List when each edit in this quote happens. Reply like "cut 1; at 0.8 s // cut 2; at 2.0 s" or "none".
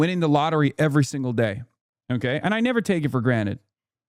none